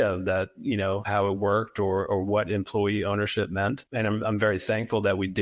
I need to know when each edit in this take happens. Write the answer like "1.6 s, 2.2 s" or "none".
1.1 s, 3.8 s